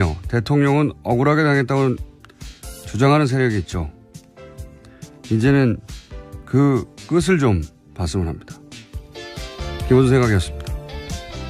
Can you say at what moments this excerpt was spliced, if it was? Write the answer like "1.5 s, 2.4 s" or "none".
2.2 s